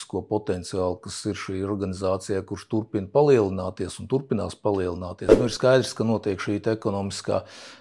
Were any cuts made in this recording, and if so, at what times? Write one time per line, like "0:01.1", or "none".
0:05.3